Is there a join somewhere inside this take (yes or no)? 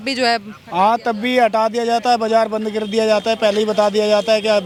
no